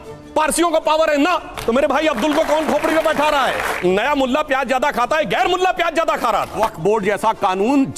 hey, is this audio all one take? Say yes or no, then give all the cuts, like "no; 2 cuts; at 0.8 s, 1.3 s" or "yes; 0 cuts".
no; 2 cuts; at 3.7 s, 6.6 s